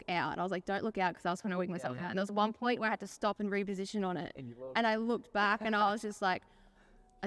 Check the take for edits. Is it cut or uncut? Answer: uncut